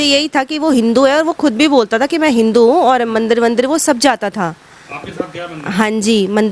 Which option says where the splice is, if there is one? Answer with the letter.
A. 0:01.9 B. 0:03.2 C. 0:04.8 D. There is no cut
D